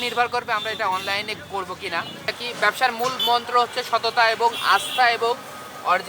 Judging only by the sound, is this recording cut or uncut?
cut